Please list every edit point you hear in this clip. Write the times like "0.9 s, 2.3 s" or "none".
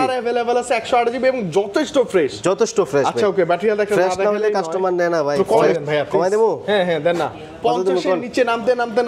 5.8 s